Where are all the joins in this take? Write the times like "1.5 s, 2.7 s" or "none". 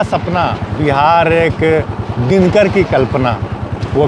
none